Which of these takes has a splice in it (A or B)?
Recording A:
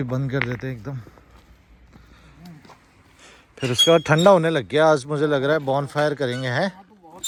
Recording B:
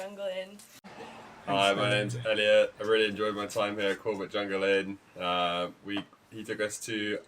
B